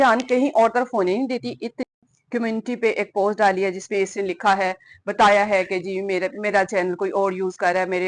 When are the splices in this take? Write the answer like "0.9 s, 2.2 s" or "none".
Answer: 1.8 s